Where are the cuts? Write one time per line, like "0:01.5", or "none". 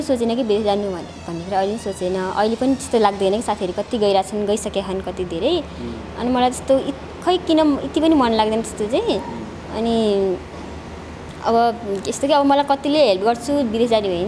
none